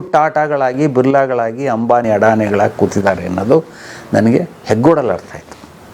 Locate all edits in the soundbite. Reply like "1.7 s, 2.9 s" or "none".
none